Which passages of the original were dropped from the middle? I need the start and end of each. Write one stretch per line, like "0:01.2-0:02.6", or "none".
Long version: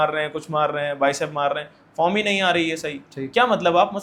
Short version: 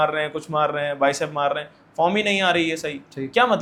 none